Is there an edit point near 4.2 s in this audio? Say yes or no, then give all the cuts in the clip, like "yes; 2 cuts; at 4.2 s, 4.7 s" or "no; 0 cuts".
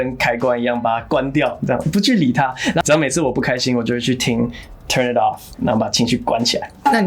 no; 1 cut; at 2.8 s